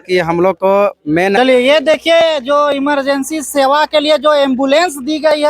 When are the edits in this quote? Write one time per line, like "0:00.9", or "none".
0:01.4